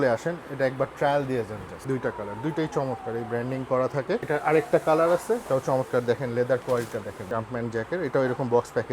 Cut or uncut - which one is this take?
cut